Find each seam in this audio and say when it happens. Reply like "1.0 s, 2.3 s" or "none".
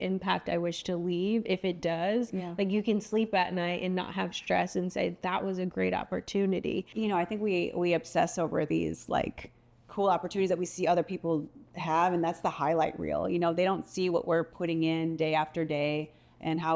6.9 s